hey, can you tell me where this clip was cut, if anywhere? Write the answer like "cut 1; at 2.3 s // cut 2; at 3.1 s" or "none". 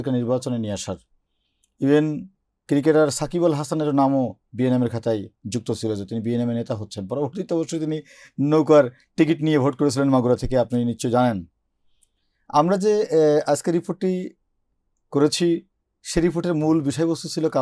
none